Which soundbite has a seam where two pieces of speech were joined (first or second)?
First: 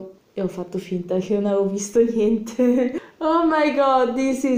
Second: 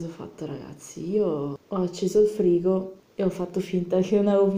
second